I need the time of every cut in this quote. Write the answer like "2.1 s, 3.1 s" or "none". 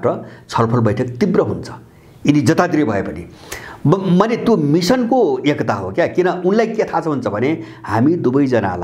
none